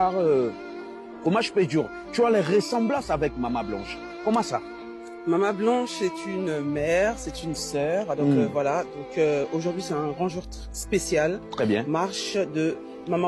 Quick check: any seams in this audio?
no; 0 cuts

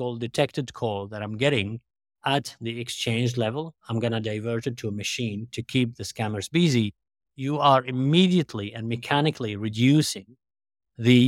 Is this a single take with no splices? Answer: yes; 0 cuts

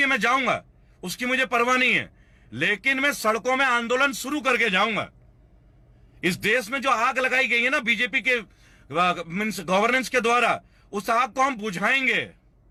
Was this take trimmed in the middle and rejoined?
no; 0 cuts

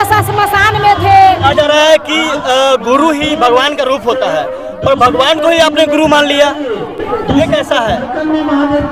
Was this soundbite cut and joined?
no; 0 cuts

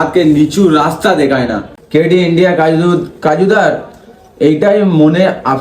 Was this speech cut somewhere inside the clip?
yes; 1 cut; at 1.6 s

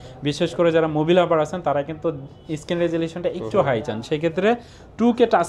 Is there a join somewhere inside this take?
no; 0 cuts

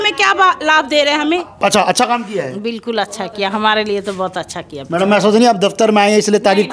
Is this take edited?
yes; 1 cut; at 1.5 s

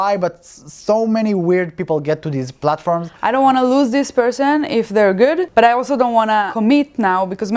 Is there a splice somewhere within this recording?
yes; 3 cuts; at 3.1 s, 5.5 s, 6.5 s

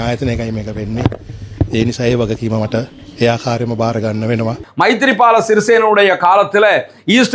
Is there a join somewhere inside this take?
yes; 1 cut; at 4.6 s

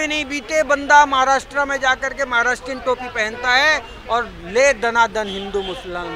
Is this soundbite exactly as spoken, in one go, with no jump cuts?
yes; 0 cuts

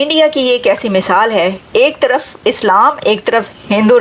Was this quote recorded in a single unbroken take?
no; 1 cut; at 1.6 s

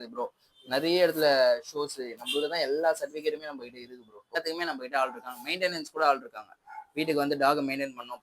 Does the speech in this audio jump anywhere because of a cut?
yes; 1 cut; at 4.4 s

